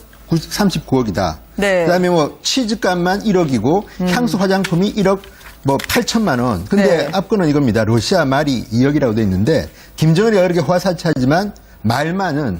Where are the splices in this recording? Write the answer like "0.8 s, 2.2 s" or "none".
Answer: 10.3 s